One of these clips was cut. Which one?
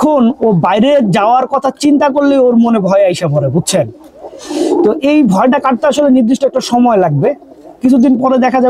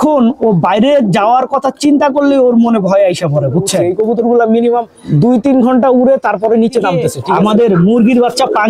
second; 3 cuts; at 3.8 s, 5.0 s, 7.1 s

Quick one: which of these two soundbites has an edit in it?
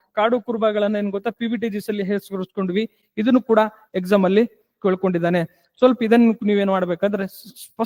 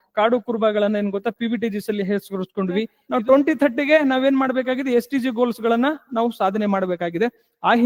second; 1 cut; at 3.0 s

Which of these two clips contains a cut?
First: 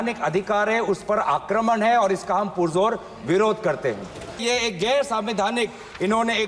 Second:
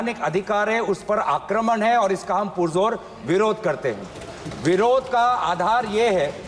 first; 1 cut; at 4.4 s

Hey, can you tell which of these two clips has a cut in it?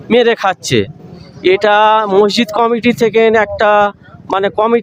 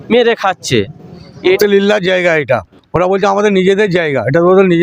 second; 1 cut; at 1.6 s

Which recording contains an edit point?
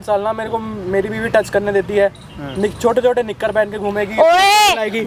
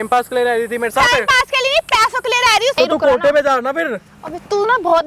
second; 1 cut; at 2.8 s

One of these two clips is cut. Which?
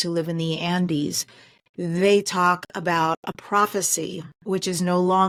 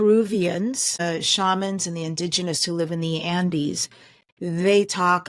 second; 1 cut; at 1.0 s

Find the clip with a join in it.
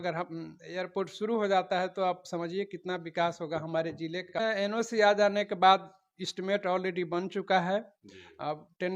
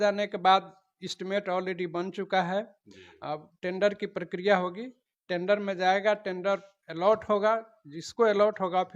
first; 1 cut; at 4.2 s

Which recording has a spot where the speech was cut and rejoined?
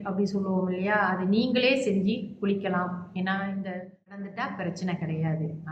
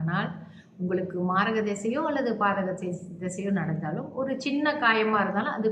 first; 1 cut; at 4.2 s

